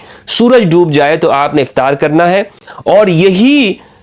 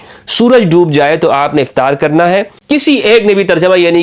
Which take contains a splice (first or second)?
second